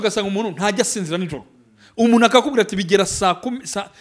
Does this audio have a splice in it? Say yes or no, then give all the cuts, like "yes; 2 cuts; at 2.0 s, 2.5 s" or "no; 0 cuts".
no; 0 cuts